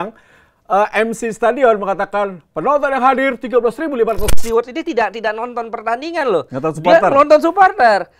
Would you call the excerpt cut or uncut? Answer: cut